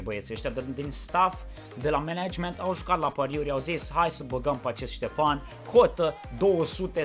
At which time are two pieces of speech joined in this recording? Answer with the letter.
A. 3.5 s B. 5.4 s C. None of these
C